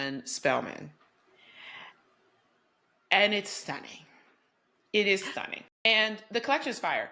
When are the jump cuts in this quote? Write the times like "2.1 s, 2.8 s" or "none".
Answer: 5.9 s